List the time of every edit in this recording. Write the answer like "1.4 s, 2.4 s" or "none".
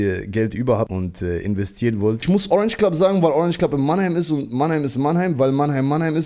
0.9 s, 2.2 s

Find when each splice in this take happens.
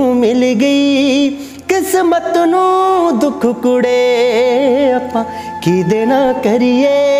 none

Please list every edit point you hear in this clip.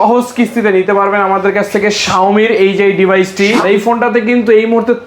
3.6 s

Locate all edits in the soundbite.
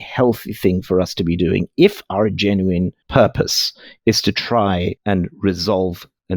5.0 s

